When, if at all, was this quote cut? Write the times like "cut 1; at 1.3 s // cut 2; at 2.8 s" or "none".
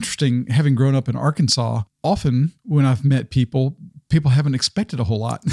cut 1; at 2.2 s